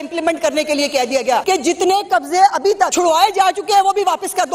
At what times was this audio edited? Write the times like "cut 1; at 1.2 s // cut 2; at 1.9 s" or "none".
cut 1; at 1.4 s // cut 2; at 2.9 s